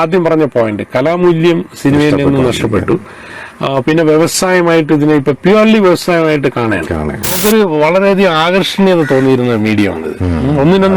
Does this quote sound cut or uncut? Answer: cut